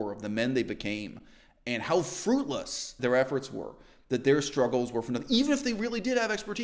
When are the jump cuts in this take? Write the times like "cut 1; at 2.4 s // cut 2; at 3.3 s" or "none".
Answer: none